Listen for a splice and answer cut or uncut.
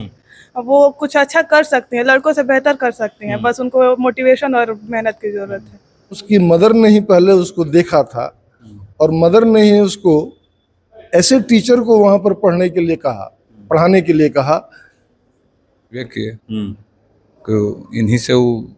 cut